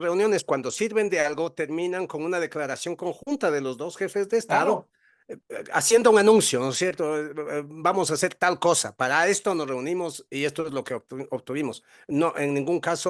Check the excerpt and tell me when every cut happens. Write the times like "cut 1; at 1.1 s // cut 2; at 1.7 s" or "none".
none

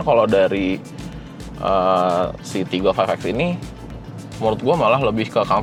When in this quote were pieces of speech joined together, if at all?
none

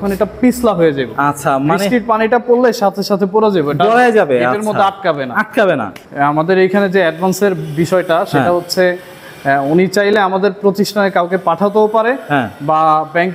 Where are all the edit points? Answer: cut 1; at 6.0 s

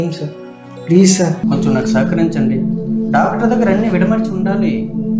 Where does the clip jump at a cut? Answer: cut 1; at 1.4 s

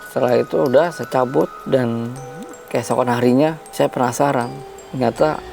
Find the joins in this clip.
cut 1; at 1.6 s // cut 2; at 3.6 s

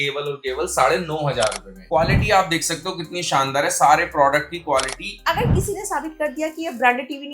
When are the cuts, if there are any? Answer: cut 1; at 1.8 s // cut 2; at 5.3 s

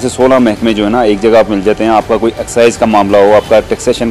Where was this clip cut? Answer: none

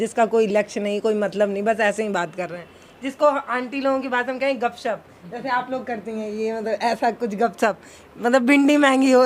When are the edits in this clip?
none

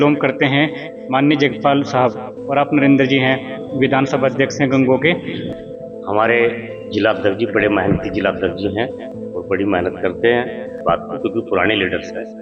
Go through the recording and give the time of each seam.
cut 1; at 5.4 s // cut 2; at 10.8 s

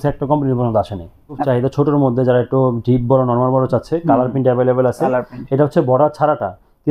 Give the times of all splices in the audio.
cut 1; at 1.4 s

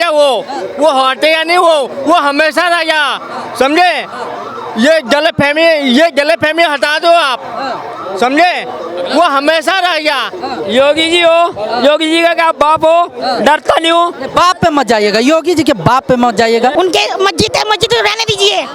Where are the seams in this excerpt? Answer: cut 1; at 16.7 s

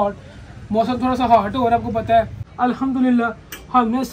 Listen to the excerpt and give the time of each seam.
cut 1; at 2.4 s

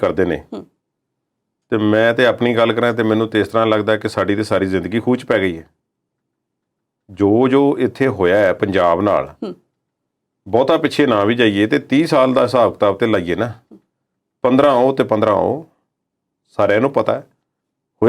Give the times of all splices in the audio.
none

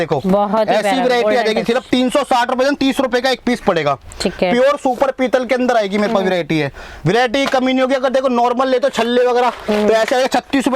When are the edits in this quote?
none

